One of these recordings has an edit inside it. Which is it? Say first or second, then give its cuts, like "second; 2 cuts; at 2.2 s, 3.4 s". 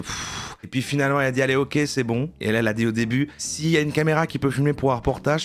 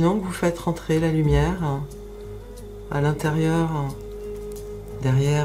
first; 1 cut; at 2.3 s